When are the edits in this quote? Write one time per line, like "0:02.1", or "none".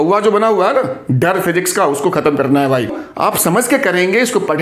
0:03.0

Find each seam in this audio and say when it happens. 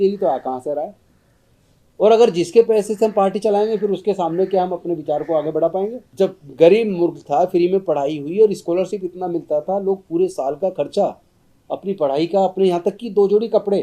0:06.0

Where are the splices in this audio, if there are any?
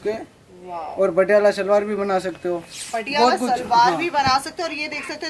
none

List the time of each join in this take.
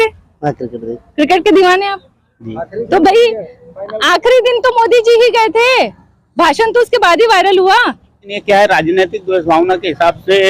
0:08.3

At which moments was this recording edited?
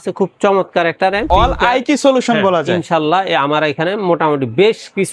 0:01.3

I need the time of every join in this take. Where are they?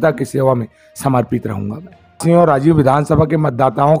0:02.2

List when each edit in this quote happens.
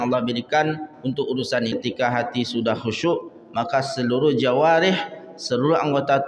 0:01.7

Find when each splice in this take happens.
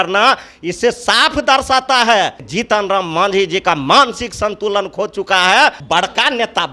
0:02.4
0:05.8

